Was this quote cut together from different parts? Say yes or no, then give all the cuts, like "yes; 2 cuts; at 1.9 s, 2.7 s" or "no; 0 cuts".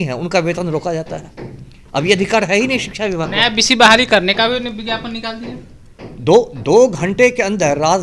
no; 0 cuts